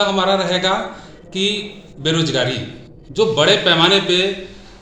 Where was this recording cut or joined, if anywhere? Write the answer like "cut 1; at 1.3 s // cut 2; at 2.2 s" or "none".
none